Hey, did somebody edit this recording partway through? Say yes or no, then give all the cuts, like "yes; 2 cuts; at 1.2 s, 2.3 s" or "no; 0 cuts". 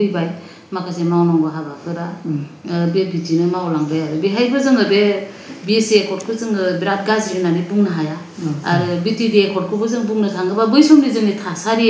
no; 0 cuts